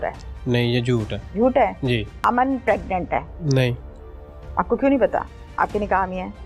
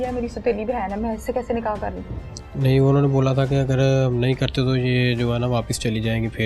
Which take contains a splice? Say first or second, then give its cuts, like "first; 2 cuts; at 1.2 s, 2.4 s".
first; 3 cuts; at 1.2 s, 2.1 s, 3.3 s